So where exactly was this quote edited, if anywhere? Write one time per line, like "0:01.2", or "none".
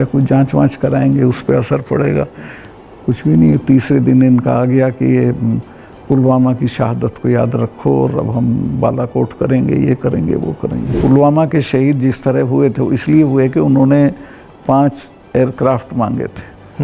0:10.9